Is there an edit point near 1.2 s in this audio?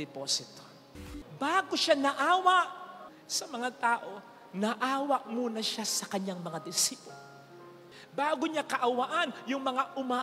yes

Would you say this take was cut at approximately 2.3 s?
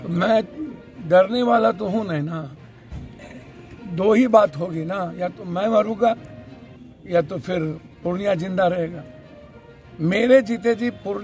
no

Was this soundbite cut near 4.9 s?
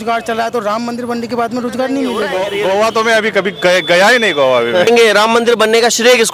yes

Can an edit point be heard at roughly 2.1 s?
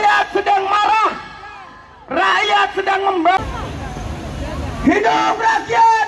no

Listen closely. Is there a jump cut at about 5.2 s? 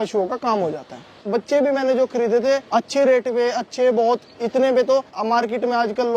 yes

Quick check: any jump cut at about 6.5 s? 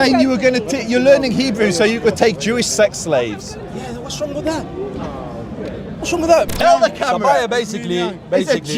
yes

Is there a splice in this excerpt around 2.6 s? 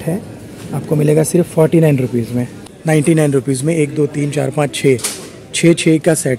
yes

